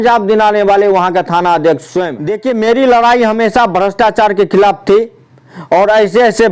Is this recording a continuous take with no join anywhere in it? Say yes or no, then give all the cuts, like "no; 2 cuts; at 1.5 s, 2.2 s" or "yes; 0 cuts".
no; 1 cut; at 2.3 s